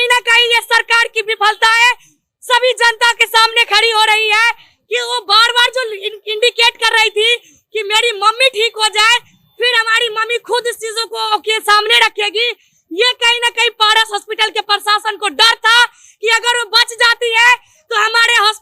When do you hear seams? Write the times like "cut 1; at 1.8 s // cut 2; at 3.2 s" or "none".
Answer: none